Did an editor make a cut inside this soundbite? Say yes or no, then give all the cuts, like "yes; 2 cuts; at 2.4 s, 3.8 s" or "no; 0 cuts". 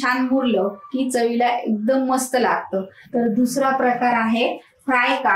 no; 0 cuts